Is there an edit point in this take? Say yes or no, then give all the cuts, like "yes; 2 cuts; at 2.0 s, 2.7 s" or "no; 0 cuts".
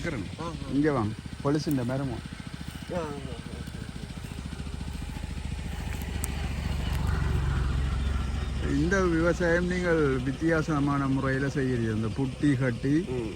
no; 0 cuts